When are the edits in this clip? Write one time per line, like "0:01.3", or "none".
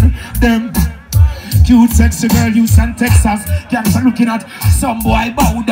none